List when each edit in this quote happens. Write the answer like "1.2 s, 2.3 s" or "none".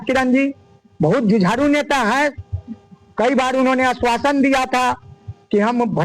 none